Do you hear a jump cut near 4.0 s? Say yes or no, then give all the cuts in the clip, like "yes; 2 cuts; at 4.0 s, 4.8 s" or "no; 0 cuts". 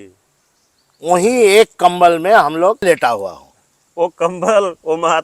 no; 1 cut; at 2.8 s